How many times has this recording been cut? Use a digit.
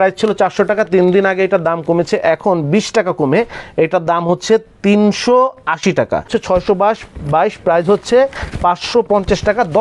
1